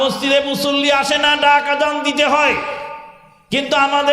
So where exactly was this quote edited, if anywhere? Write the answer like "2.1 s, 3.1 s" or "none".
none